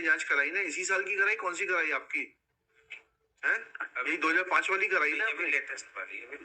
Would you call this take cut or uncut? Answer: uncut